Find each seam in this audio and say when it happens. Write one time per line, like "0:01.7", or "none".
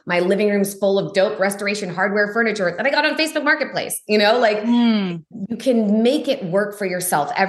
none